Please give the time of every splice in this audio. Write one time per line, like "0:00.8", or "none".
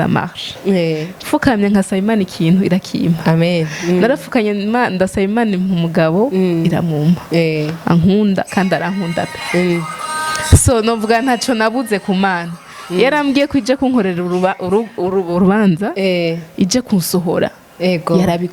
none